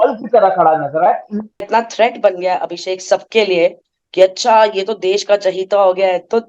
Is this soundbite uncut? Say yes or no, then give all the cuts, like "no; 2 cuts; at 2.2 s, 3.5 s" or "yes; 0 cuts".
no; 1 cut; at 1.7 s